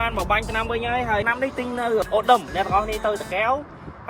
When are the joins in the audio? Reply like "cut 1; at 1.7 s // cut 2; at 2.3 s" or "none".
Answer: cut 1; at 2.0 s